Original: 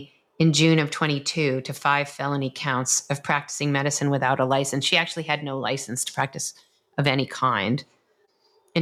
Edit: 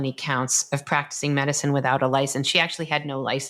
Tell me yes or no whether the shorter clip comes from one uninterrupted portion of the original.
yes